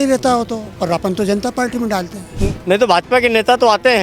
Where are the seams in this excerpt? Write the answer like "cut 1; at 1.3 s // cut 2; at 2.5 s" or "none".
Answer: cut 1; at 2.2 s